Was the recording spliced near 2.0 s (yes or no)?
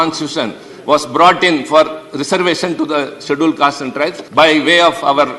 no